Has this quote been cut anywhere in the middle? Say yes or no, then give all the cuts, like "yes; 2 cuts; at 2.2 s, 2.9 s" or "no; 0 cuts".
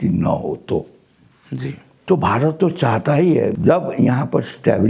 yes; 1 cut; at 3.5 s